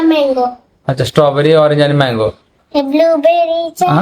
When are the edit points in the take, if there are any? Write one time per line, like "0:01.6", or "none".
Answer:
0:02.6

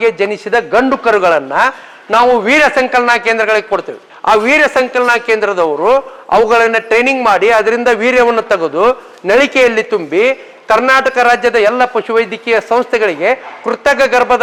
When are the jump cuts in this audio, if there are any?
none

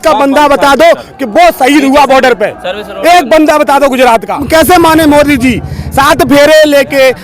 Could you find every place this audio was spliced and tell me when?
0:04.4

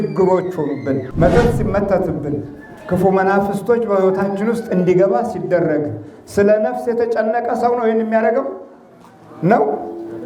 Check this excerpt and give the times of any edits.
0:01.1

